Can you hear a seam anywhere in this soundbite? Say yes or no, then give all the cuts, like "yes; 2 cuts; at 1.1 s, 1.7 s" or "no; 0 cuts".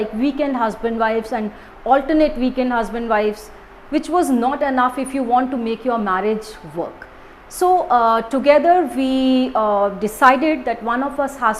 no; 0 cuts